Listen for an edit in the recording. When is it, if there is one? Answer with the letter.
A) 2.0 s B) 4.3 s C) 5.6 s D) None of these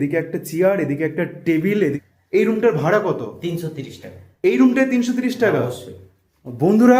A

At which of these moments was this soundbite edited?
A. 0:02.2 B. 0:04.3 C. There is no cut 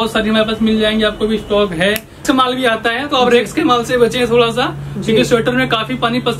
A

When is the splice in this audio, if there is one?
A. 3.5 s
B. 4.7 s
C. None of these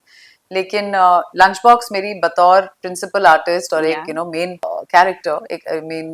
B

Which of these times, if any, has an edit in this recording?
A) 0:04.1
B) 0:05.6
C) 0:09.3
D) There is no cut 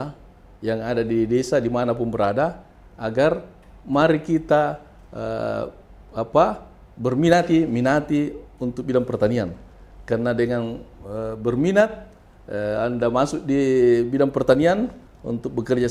D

